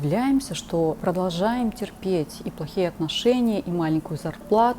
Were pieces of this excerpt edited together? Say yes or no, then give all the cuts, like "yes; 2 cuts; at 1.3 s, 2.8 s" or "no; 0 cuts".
yes; 1 cut; at 1.0 s